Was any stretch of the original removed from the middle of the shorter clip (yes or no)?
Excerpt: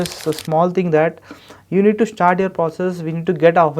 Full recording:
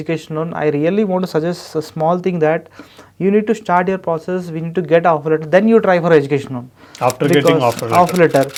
no